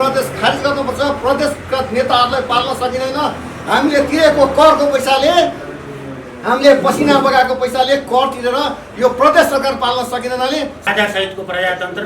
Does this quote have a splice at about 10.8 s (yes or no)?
yes